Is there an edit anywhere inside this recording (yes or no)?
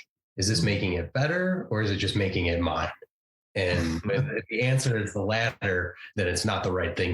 yes